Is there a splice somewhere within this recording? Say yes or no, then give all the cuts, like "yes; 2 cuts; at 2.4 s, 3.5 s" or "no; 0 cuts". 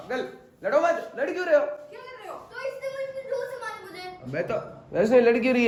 no; 0 cuts